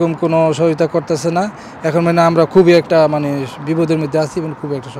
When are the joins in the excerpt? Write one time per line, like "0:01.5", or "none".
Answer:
none